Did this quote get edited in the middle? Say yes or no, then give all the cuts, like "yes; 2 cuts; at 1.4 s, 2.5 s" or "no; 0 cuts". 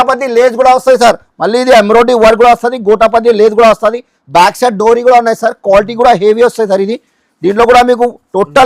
no; 0 cuts